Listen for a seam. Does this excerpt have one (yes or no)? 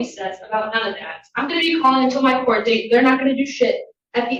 no